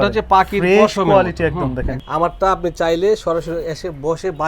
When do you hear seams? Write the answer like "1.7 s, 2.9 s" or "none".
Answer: 1.9 s